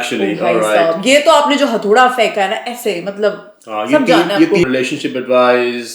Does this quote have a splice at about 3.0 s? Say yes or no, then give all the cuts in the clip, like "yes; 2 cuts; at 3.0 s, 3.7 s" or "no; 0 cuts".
no; 1 cut; at 4.7 s